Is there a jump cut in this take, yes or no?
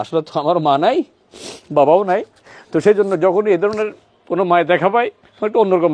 no